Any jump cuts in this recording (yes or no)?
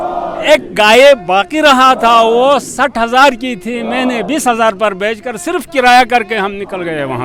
no